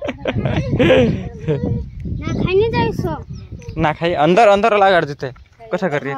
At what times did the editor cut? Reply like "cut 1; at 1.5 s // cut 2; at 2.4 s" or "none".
none

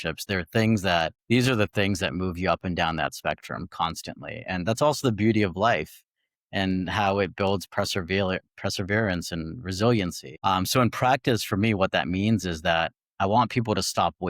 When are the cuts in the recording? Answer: cut 1; at 1.2 s // cut 2; at 10.2 s

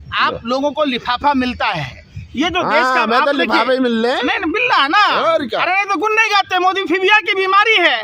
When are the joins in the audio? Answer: none

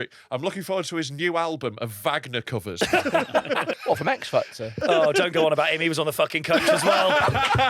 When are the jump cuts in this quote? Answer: cut 1; at 2.7 s // cut 2; at 3.7 s // cut 3; at 4.8 s

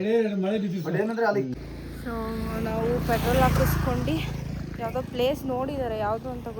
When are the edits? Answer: cut 1; at 1.5 s

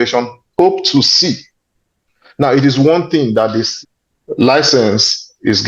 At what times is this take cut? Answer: cut 1; at 3.7 s

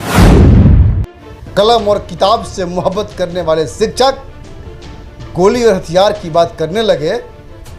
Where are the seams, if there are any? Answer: cut 1; at 1.4 s

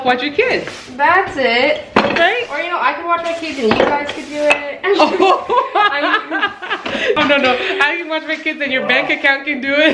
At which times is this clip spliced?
cut 1; at 7.2 s

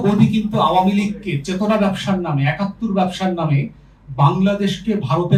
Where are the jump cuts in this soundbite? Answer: none

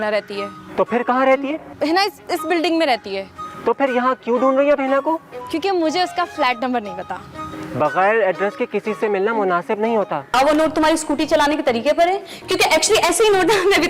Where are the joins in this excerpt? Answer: cut 1; at 10.3 s

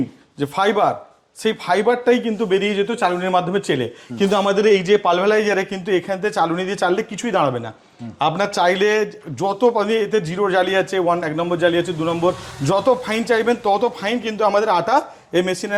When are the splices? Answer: none

